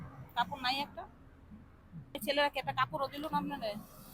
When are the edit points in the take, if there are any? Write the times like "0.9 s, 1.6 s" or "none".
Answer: 2.2 s